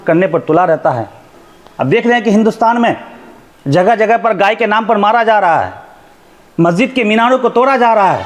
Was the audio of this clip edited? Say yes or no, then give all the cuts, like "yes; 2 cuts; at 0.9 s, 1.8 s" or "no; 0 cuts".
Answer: no; 0 cuts